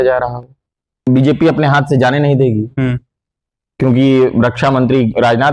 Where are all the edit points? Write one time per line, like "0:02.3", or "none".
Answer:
0:01.1